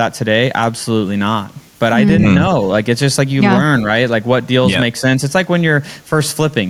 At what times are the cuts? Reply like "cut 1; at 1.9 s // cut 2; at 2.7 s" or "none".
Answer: none

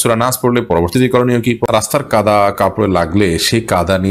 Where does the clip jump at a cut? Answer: cut 1; at 1.6 s

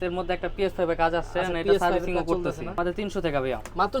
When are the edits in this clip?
cut 1; at 2.8 s

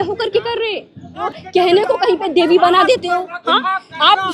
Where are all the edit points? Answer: cut 1; at 1.2 s

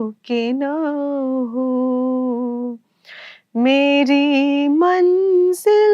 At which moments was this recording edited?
none

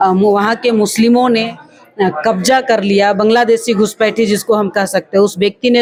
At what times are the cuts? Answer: none

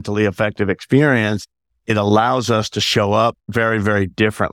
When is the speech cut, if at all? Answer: cut 1; at 3.4 s

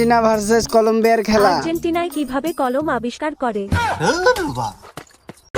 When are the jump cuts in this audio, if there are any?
cut 1; at 1.6 s

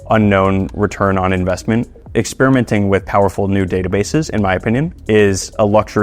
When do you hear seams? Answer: cut 1; at 2.0 s

